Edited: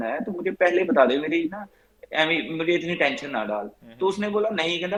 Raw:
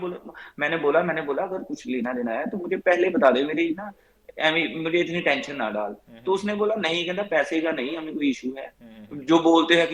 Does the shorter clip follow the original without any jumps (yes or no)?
yes